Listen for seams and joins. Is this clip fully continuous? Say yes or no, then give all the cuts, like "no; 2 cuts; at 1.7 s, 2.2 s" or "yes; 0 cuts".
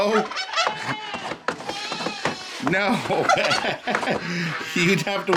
yes; 0 cuts